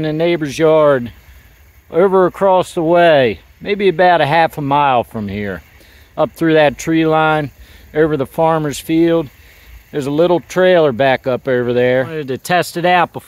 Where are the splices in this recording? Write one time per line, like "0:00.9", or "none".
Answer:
0:12.3